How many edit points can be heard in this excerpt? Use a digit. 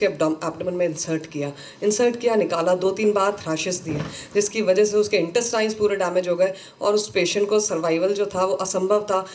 0